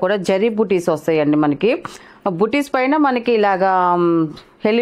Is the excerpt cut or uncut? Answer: uncut